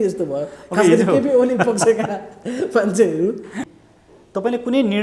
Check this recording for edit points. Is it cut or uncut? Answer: cut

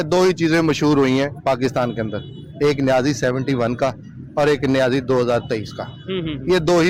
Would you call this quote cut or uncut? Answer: uncut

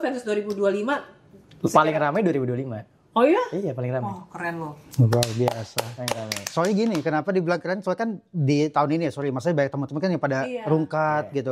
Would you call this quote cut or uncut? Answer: uncut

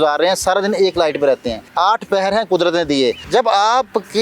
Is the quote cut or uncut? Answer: cut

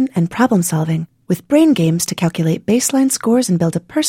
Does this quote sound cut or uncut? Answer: uncut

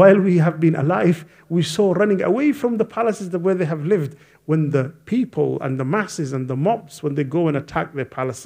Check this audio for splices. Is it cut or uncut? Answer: uncut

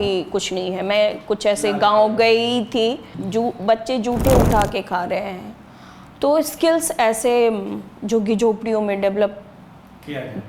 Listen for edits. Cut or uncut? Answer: uncut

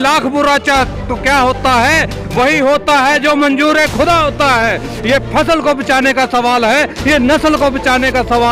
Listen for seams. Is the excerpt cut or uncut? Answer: uncut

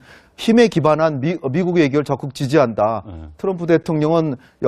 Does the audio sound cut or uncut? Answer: cut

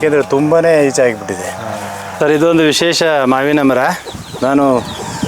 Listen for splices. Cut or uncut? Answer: cut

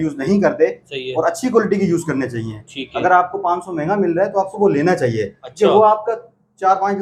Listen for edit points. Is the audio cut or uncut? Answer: uncut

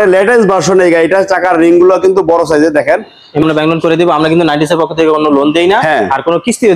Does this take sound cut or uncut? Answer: cut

